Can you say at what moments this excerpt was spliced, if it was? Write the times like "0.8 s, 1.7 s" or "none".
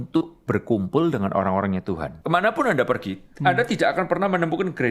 2.1 s